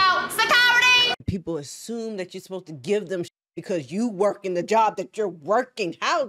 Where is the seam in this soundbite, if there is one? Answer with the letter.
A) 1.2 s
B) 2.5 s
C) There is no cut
A